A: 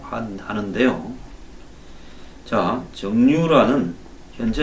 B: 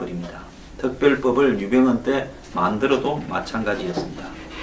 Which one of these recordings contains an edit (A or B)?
B